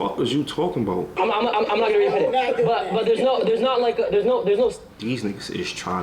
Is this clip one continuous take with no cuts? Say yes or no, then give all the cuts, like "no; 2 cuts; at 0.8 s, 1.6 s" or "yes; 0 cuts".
no; 1 cut; at 1.2 s